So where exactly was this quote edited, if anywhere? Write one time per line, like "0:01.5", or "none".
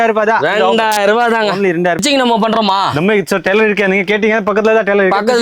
0:02.0